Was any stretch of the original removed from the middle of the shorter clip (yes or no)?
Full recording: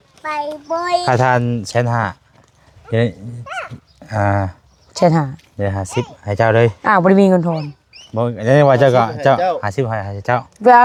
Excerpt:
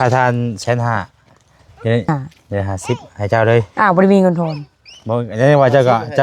yes